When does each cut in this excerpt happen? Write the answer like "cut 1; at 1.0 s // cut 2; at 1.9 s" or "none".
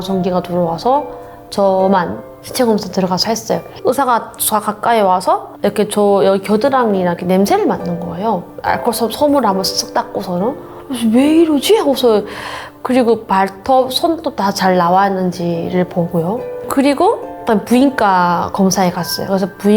cut 1; at 3.7 s // cut 2; at 5.5 s // cut 3; at 10.7 s